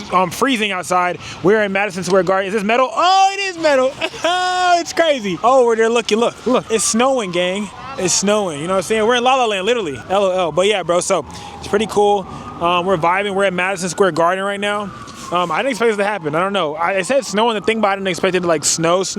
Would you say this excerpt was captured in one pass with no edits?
no; 4 cuts; at 5.3 s, 6.7 s, 7.8 s, 10.0 s

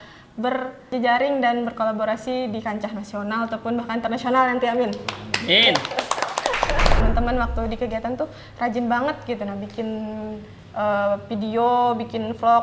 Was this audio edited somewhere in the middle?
yes; 2 cuts; at 0.9 s, 7.0 s

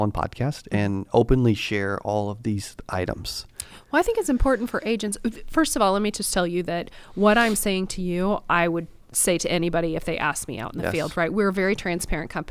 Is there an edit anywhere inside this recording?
no; 0 cuts

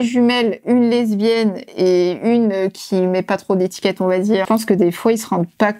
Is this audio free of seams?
no; 1 cut; at 4.4 s

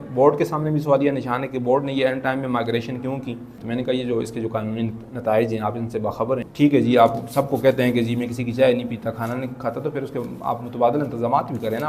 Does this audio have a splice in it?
yes; 2 cuts; at 3.6 s, 6.5 s

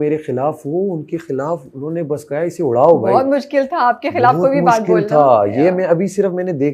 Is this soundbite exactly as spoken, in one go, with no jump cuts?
yes; 0 cuts

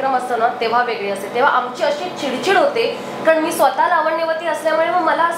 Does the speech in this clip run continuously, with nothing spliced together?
yes; 0 cuts

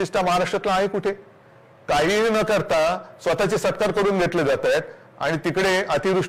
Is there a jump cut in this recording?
no; 0 cuts

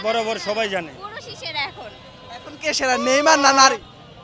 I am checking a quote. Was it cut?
no; 0 cuts

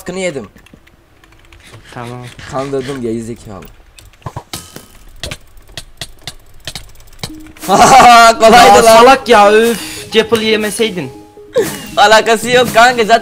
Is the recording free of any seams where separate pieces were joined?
yes; 0 cuts

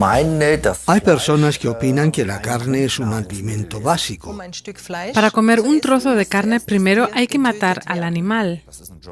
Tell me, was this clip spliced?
no; 0 cuts

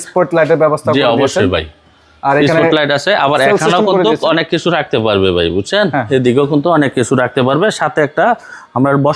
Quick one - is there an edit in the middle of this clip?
no; 0 cuts

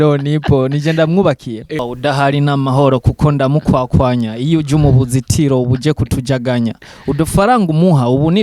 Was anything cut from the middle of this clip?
yes; 1 cut; at 1.8 s

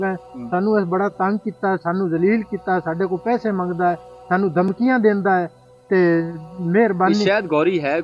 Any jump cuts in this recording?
no; 0 cuts

